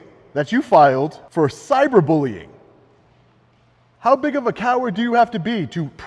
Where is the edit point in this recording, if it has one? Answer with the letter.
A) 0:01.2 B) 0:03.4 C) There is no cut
A